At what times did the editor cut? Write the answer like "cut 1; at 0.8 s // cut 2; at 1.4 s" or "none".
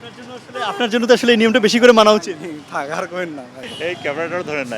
cut 1; at 3.6 s

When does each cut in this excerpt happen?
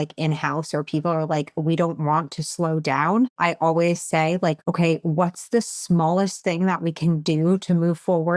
cut 1; at 3.3 s // cut 2; at 4.6 s

